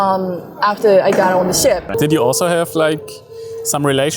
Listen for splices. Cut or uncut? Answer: cut